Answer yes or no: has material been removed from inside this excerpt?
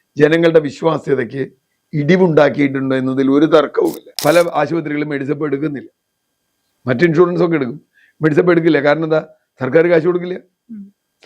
yes